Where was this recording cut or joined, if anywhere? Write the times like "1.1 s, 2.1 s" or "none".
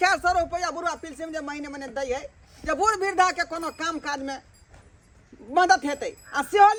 none